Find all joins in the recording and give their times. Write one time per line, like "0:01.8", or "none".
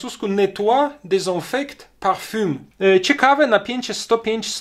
0:02.6